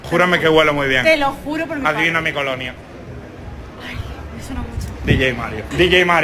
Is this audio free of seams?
yes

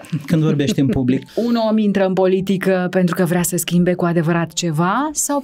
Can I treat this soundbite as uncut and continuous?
no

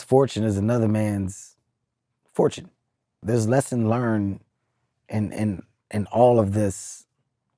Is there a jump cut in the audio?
yes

